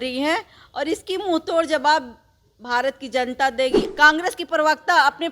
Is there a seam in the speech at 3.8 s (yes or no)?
yes